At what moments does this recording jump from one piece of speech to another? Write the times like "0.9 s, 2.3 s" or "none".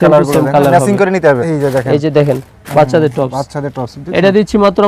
1.5 s